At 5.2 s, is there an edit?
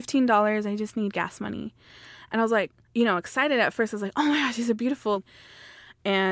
yes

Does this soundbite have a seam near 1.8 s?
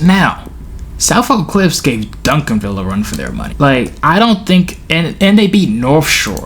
no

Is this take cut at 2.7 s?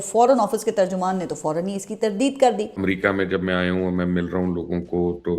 yes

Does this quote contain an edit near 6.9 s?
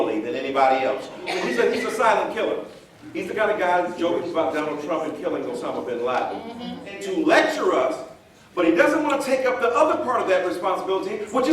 yes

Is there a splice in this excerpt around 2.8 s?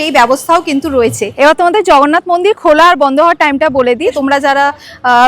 no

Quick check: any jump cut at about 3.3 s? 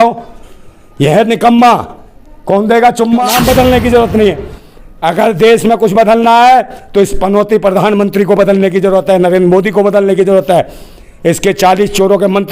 yes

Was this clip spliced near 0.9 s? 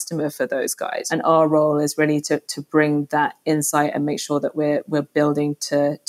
yes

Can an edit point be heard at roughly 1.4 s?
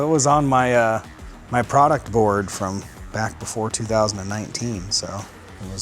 no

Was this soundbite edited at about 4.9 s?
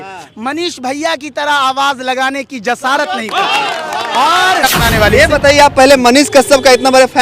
yes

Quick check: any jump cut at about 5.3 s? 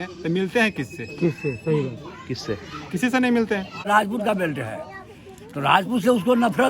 no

